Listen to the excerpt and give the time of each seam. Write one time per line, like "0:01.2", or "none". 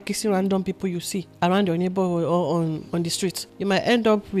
0:01.2
0:03.1